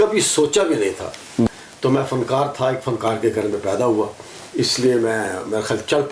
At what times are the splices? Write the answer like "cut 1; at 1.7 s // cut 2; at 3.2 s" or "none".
cut 1; at 1.5 s